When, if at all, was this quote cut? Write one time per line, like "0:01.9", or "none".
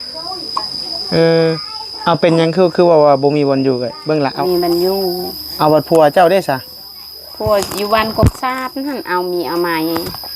0:04.4